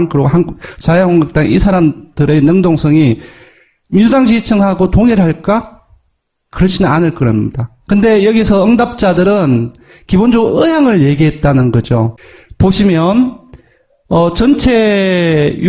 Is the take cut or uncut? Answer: cut